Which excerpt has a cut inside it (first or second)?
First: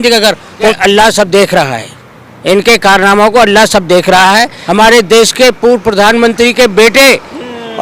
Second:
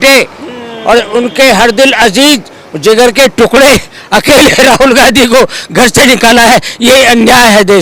first